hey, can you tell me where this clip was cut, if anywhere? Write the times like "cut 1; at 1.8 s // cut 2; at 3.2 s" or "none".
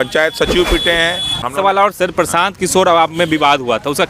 cut 1; at 1.4 s